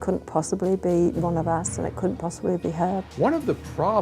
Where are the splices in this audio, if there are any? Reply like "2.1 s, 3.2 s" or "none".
3.1 s